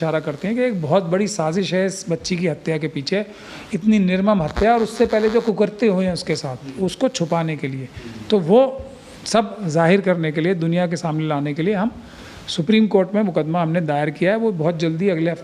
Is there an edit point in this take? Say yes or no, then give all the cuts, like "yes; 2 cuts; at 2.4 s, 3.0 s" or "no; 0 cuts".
no; 0 cuts